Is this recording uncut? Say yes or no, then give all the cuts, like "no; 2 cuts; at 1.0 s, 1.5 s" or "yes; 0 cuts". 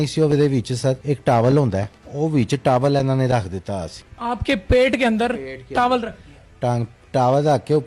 yes; 0 cuts